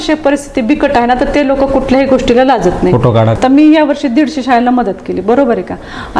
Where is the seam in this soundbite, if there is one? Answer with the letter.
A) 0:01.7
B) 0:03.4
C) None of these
B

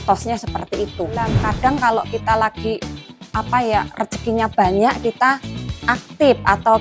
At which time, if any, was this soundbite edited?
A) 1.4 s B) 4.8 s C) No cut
A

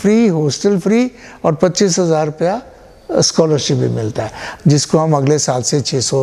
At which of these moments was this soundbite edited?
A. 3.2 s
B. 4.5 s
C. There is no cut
B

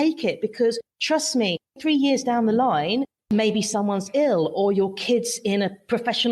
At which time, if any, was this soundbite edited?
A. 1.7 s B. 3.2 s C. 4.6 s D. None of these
B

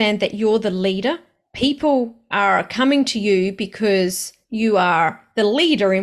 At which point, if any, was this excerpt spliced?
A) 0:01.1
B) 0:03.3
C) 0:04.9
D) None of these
D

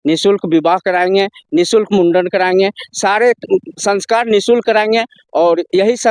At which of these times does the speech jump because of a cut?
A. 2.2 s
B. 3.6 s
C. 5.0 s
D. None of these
D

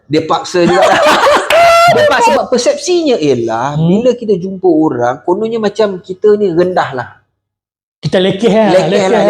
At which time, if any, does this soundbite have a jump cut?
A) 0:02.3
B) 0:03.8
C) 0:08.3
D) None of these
A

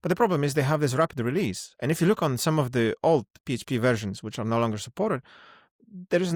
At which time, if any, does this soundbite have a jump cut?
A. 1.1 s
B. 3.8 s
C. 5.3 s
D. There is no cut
D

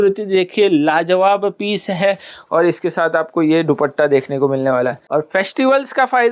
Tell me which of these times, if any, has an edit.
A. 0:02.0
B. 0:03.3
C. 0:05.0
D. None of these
C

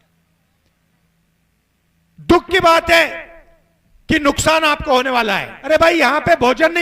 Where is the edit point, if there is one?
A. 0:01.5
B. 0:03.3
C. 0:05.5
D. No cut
C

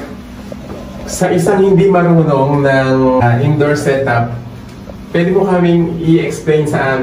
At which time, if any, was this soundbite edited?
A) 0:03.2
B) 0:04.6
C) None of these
A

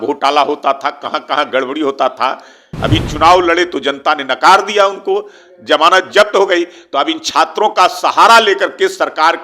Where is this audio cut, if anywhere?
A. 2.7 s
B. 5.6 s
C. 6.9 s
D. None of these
A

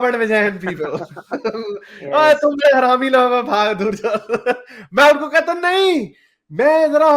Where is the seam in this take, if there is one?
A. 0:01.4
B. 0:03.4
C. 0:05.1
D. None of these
D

